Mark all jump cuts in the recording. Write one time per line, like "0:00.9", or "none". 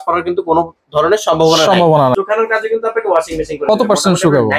0:02.1